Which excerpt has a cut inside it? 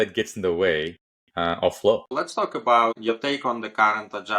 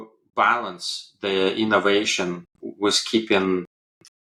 first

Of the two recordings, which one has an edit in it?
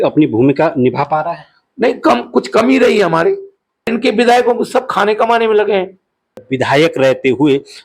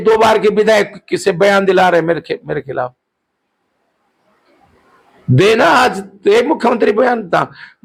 first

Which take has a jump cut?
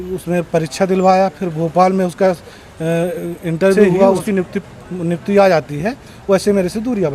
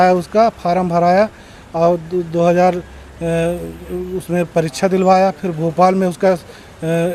first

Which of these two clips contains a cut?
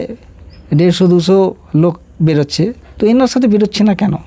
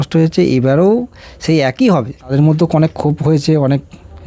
second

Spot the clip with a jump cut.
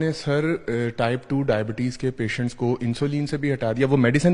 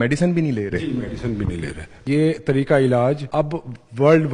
second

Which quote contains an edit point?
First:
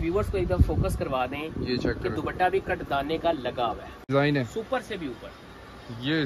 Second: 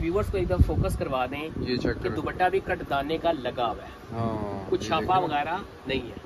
first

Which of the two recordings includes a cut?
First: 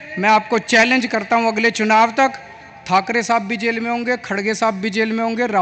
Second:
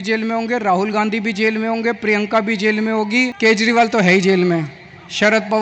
second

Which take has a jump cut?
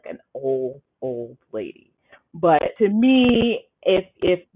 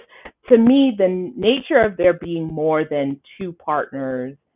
first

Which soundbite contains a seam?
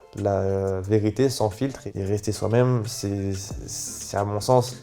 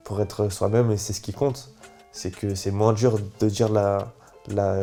first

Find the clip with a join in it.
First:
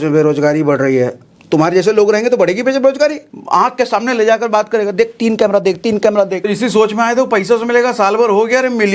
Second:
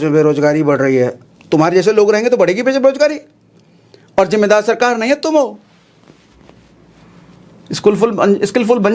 first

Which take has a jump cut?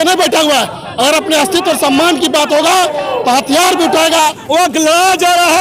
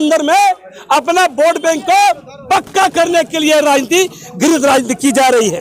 first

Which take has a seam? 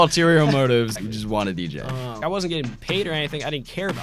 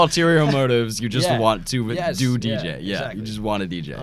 first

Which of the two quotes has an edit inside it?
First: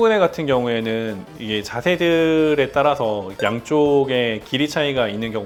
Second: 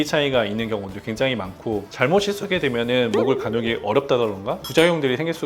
second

